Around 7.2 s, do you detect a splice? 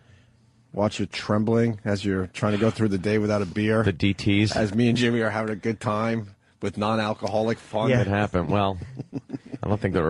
yes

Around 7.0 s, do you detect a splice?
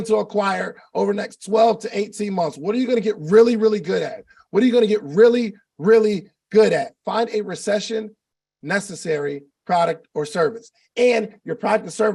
yes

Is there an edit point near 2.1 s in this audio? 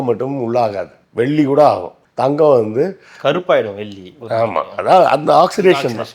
no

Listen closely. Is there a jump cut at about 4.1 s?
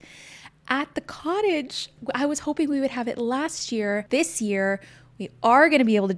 yes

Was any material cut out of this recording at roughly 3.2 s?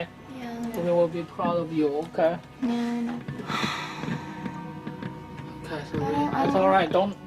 yes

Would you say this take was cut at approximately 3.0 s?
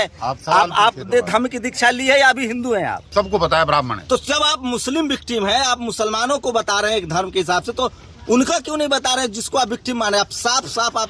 yes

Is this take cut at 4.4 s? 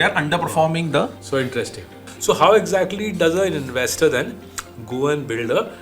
no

